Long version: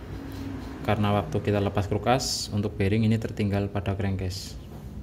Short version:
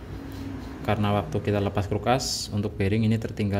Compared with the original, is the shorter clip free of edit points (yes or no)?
yes